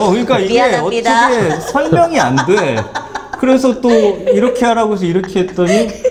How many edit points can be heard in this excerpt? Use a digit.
0